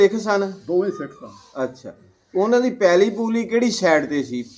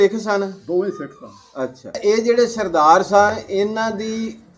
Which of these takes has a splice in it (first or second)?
second